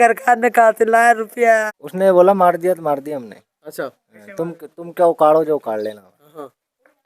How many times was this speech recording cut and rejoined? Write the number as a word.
one